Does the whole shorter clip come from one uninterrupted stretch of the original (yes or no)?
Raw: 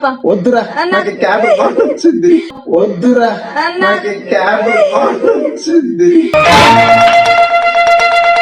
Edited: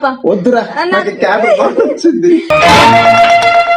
no